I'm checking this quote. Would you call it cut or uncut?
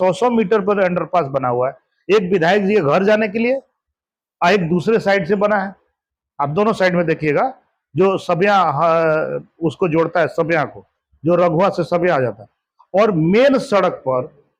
uncut